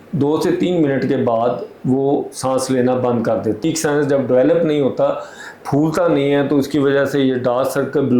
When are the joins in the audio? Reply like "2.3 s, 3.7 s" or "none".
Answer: 3.6 s

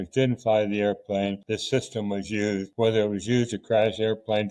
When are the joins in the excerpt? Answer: 1.4 s, 2.7 s

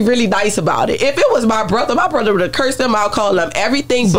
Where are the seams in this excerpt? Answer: none

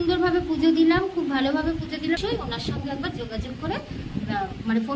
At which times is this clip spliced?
2.2 s

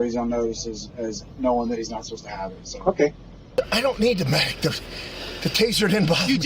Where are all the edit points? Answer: 3.4 s

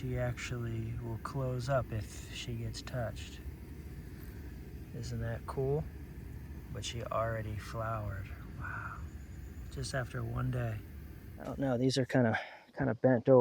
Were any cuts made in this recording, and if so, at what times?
11.5 s

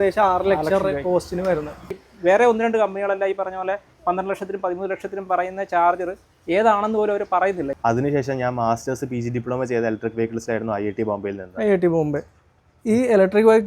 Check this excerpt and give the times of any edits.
2.0 s, 7.7 s

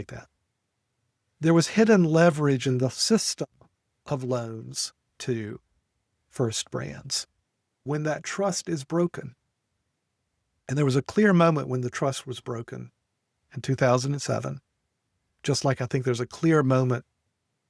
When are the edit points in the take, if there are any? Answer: 7.8 s

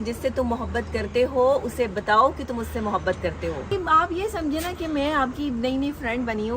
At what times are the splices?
3.7 s

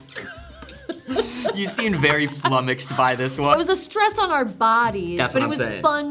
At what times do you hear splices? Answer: 3.6 s

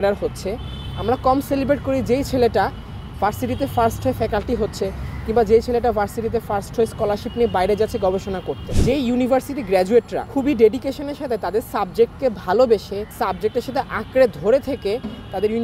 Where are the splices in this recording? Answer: 8.6 s, 10.2 s, 13.0 s

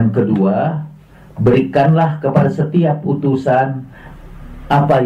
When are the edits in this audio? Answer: none

